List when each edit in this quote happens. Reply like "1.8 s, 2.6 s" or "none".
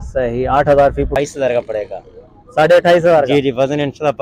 1.1 s